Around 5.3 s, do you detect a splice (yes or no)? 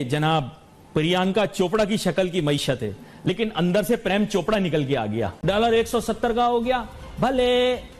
yes